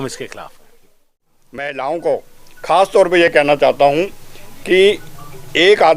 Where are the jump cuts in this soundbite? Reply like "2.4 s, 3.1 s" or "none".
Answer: 1.4 s